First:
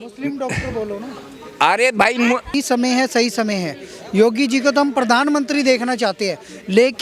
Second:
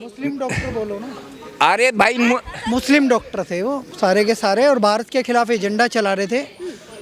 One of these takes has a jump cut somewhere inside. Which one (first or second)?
first